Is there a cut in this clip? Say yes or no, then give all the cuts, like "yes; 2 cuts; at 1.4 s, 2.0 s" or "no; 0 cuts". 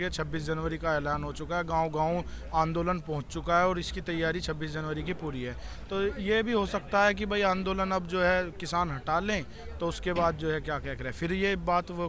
no; 0 cuts